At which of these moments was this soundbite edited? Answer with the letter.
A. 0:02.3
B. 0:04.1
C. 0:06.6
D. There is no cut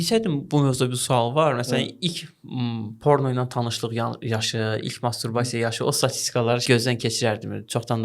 C